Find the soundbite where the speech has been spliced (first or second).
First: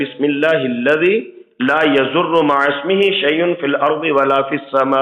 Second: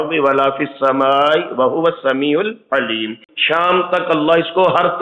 second